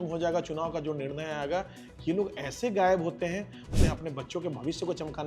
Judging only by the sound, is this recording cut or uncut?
cut